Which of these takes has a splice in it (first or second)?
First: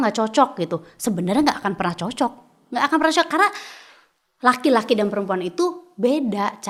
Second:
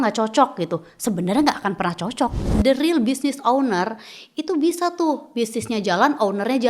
second